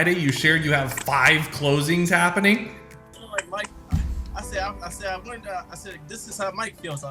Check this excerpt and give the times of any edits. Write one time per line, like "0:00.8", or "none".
0:03.2